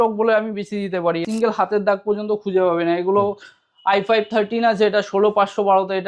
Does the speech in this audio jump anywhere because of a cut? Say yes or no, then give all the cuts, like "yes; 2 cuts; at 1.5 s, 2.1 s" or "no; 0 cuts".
yes; 1 cut; at 1.2 s